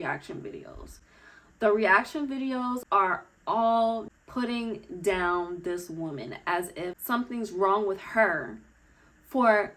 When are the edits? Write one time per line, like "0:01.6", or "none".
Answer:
0:02.8
0:04.1
0:07.0